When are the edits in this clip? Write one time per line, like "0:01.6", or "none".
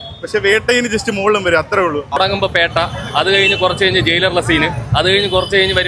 0:02.2